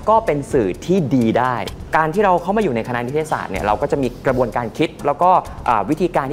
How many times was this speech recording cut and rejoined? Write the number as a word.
two